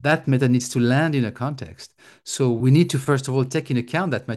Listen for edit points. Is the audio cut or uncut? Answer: cut